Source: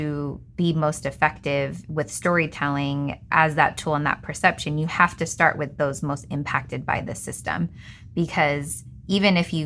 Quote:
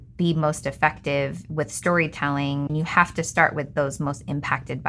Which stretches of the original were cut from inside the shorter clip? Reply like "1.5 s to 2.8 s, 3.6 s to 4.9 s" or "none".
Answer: 3.1 s to 4.7 s